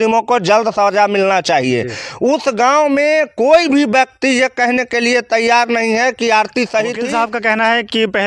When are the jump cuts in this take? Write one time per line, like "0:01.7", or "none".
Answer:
0:07.1